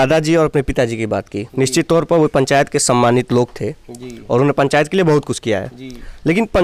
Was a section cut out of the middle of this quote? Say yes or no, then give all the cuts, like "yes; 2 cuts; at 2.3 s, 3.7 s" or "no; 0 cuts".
no; 0 cuts